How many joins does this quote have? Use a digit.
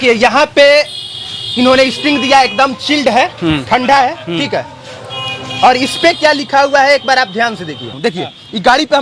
1